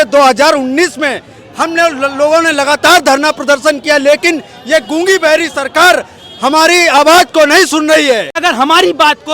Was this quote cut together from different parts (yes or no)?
yes